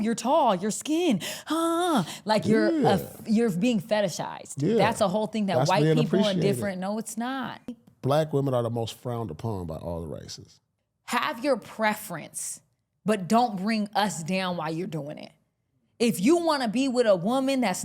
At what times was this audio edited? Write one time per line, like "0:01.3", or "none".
0:07.8
0:10.7